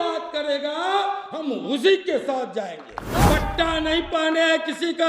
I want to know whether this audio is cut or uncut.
cut